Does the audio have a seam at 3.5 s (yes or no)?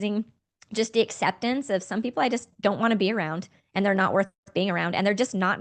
no